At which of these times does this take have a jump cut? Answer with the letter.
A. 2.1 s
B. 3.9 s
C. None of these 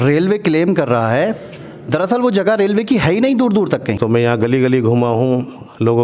B